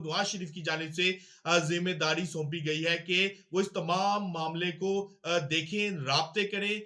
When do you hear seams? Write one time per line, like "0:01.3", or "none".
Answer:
none